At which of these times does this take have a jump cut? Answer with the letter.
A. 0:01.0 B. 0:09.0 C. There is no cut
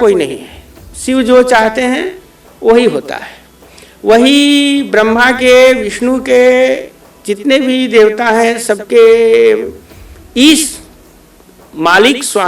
C